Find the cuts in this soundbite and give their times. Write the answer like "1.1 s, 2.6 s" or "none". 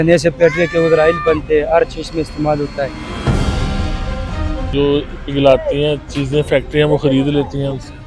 3.1 s, 4.7 s